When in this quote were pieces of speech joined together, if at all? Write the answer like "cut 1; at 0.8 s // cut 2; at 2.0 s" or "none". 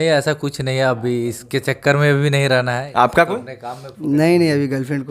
cut 1; at 2.8 s